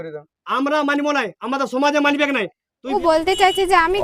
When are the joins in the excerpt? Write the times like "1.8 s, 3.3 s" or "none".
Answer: 2.9 s